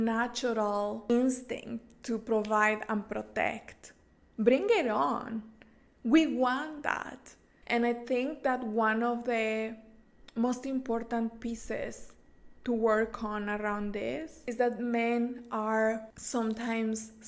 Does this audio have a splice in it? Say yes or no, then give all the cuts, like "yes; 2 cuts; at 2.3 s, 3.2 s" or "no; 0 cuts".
yes; 1 cut; at 1.1 s